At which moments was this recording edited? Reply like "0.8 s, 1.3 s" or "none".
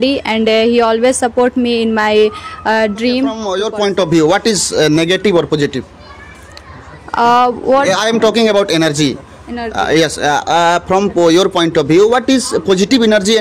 3.5 s